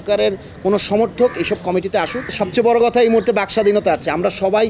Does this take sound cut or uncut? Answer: cut